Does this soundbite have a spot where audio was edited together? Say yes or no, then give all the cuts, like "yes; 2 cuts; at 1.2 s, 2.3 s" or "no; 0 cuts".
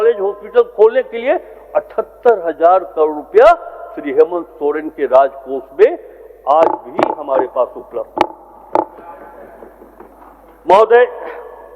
no; 0 cuts